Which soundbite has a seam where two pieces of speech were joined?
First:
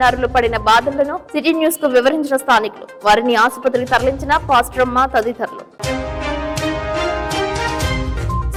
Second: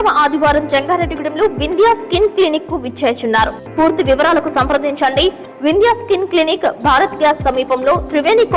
second; 1 cut; at 3.6 s

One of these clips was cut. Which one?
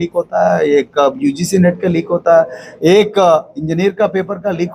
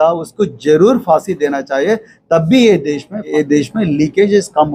second; 1 cut; at 3.3 s

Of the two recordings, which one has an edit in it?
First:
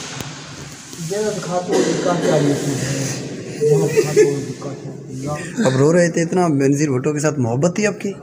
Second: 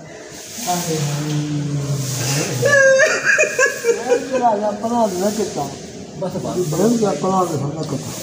first; 1 cut; at 5.4 s

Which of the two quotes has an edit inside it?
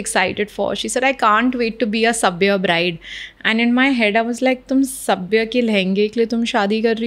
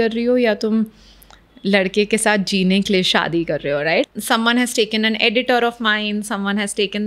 second; 1 cut; at 4.1 s

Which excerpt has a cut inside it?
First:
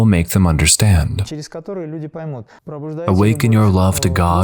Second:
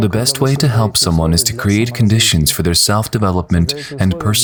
first; 2 cuts; at 1.2 s, 2.7 s

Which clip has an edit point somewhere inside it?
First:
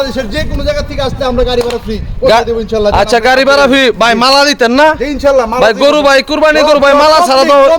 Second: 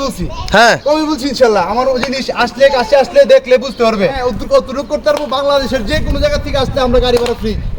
second; 1 cut; at 4.2 s

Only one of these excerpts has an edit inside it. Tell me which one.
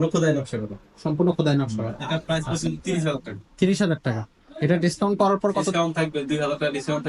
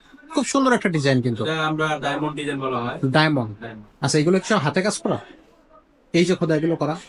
first; 1 cut; at 2.0 s

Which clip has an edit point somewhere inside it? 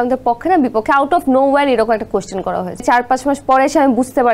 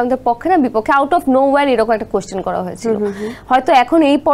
first; 1 cut; at 2.8 s

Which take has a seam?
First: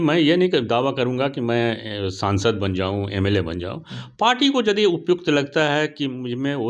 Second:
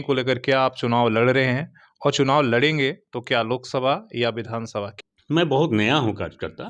second; 1 cut; at 4.8 s

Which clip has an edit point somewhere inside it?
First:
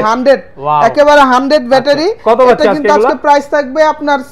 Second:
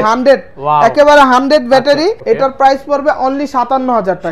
second; 1 cut; at 2.2 s

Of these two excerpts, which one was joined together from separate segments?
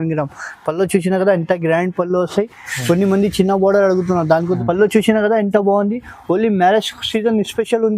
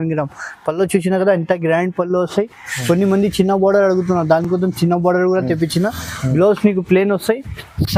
first; 1 cut; at 4.4 s

